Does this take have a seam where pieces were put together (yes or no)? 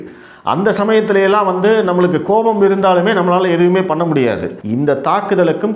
yes